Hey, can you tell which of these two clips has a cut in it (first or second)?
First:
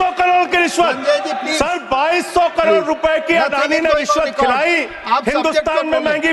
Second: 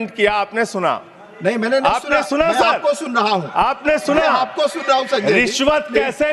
first